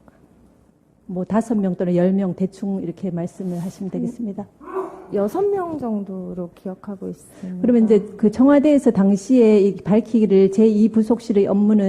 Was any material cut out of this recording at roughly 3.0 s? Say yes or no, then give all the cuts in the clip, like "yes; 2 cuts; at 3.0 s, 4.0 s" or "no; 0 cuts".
yes; 1 cut; at 3.0 s